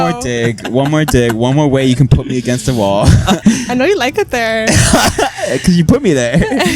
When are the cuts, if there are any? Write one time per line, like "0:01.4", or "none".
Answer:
0:03.4